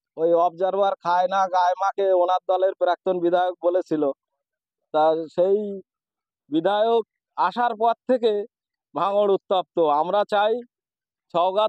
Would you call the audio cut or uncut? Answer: uncut